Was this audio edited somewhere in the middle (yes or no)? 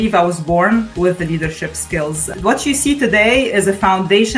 yes